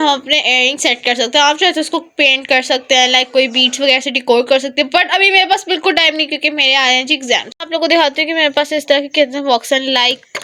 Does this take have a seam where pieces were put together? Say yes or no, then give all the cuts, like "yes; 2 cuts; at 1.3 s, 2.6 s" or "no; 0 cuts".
no; 0 cuts